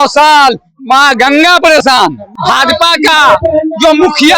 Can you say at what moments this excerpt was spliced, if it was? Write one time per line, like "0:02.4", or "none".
0:02.4